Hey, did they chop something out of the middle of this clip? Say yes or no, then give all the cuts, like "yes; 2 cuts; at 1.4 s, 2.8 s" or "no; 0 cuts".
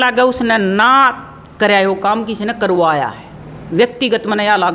no; 0 cuts